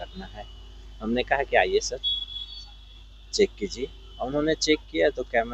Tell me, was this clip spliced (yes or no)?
no